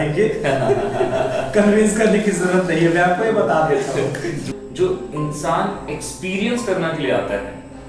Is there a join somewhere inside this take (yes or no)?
yes